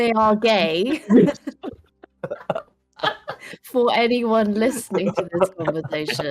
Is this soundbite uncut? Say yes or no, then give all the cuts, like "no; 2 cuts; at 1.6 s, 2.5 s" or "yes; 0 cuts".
yes; 0 cuts